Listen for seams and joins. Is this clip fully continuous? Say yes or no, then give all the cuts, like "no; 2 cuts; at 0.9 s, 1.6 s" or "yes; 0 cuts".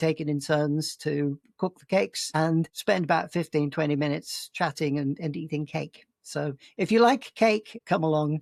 yes; 0 cuts